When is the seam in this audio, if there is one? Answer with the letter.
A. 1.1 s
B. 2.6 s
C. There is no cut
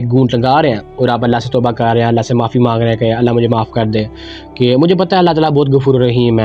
C